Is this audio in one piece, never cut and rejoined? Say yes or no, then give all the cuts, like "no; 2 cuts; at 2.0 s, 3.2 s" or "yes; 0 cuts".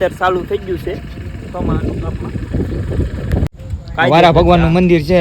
no; 1 cut; at 3.5 s